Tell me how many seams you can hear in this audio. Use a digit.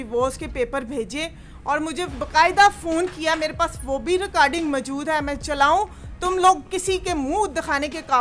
0